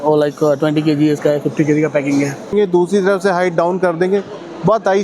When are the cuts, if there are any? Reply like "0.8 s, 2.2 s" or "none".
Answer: 2.5 s